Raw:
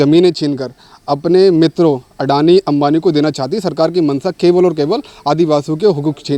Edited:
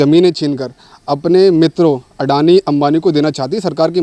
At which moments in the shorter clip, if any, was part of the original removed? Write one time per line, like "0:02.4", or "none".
none